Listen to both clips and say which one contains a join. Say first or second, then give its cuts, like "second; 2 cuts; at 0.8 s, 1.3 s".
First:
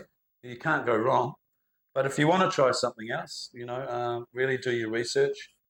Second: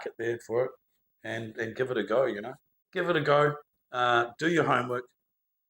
second; 1 cut; at 2.9 s